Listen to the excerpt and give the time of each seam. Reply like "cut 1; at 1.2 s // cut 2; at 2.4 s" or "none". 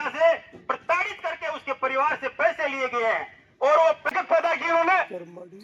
cut 1; at 4.1 s